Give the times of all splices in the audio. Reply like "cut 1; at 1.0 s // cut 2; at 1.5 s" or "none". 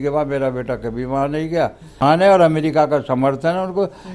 cut 1; at 2.0 s